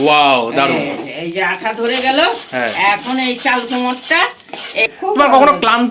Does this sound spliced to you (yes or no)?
yes